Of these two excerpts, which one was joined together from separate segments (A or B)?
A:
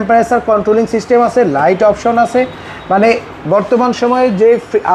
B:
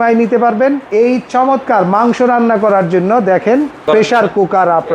B